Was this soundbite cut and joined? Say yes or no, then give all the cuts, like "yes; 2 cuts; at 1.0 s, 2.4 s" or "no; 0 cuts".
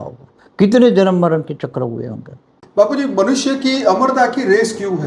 yes; 1 cut; at 2.6 s